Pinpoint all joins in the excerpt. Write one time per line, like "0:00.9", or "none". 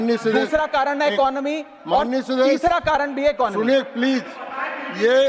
none